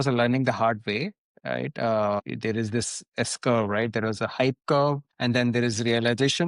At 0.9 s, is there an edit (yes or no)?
no